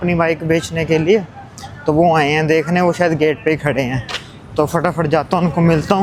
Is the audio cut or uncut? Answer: uncut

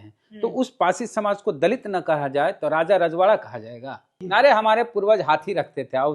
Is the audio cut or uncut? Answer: cut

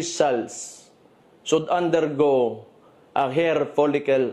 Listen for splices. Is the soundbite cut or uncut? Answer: uncut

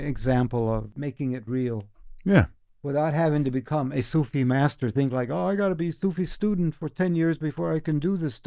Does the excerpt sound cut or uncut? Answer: cut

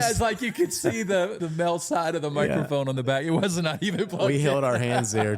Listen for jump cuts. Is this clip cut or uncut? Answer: cut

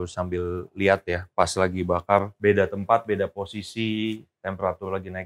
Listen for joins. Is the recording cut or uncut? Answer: cut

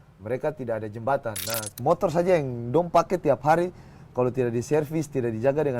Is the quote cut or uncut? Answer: cut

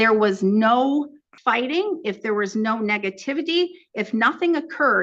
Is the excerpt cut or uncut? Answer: cut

